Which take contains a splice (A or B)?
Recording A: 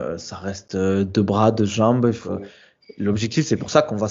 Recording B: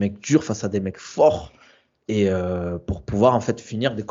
A